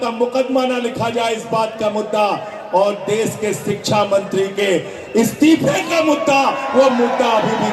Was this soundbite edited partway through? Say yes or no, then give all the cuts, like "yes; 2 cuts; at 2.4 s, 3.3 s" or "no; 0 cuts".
no; 0 cuts